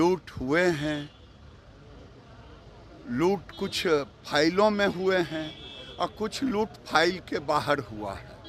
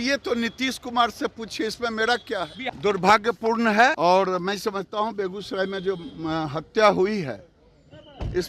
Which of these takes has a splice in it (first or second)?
second